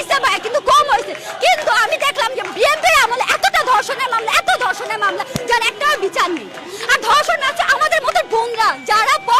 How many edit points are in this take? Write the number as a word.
zero